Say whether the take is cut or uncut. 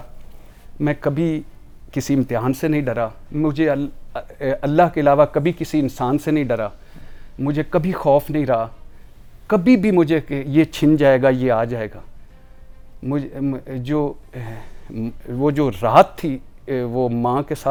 uncut